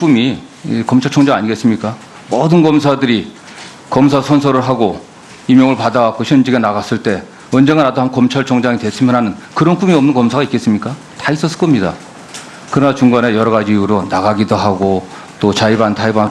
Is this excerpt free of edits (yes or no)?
no